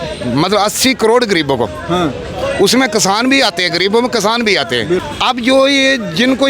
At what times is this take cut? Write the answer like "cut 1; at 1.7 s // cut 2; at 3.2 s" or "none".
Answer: cut 1; at 5.0 s